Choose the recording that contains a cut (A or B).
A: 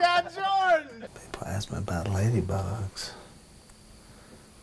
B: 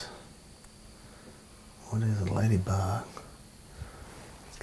A